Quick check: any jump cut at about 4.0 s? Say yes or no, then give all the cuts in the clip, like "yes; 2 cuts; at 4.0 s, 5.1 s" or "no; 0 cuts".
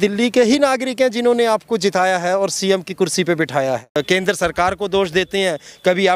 yes; 1 cut; at 4.0 s